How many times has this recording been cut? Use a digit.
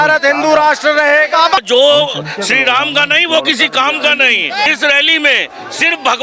2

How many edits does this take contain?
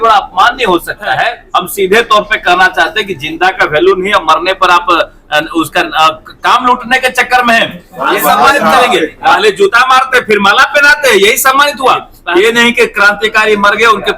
3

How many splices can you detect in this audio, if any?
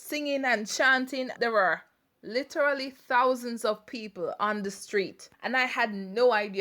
2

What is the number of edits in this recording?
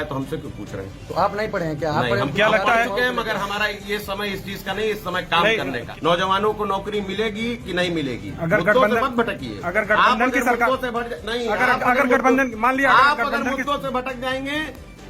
1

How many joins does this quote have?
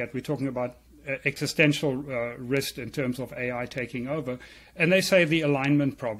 0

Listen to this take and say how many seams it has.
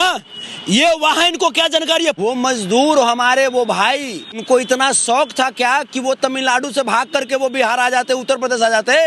2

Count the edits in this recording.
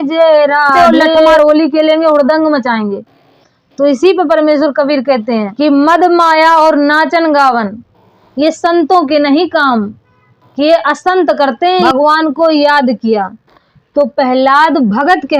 3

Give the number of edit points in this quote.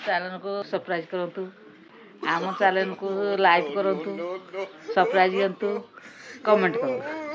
0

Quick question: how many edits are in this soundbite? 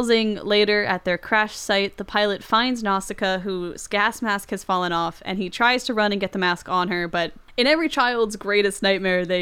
1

